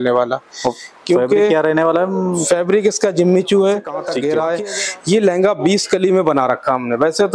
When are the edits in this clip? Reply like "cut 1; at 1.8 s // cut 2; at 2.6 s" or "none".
cut 1; at 4.1 s